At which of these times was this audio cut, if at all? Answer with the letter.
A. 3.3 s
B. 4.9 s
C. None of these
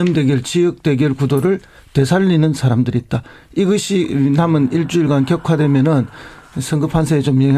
B